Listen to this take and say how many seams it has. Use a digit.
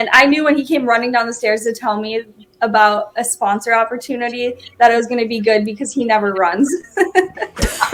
0